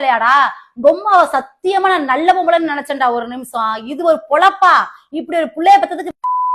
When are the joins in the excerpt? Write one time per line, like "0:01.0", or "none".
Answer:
none